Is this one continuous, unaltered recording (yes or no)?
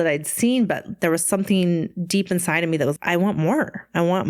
no